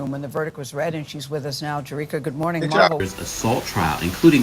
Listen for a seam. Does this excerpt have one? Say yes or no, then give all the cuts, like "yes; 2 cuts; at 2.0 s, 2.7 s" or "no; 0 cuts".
yes; 1 cut; at 3.0 s